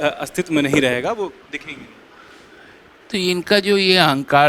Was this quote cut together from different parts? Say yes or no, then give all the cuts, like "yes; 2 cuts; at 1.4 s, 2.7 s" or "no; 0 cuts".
no; 0 cuts